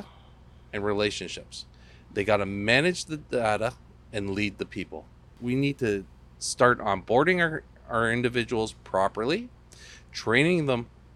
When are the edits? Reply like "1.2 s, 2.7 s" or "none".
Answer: 5.3 s